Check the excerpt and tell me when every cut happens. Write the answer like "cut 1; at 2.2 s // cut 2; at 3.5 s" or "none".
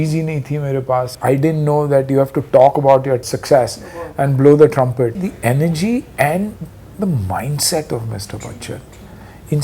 cut 1; at 1.1 s // cut 2; at 3.3 s // cut 3; at 5.3 s // cut 4; at 6.8 s